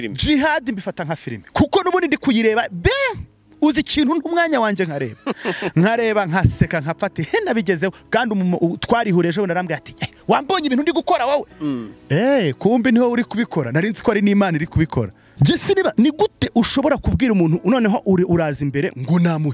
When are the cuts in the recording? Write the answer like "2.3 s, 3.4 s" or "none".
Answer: 15.2 s